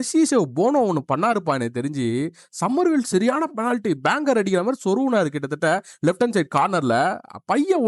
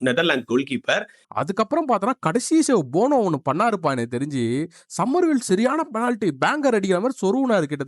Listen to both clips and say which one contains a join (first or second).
second